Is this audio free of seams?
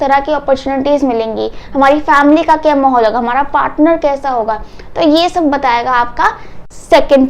yes; 0 cuts

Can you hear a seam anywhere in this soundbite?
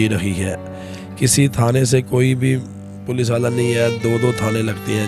no; 0 cuts

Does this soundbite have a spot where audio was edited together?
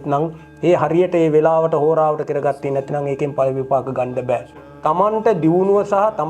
yes; 1 cut; at 4.6 s

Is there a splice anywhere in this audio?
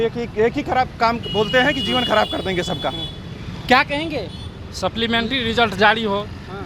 no; 0 cuts

